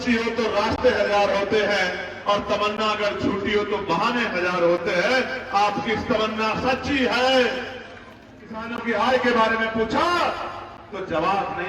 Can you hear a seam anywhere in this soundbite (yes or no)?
yes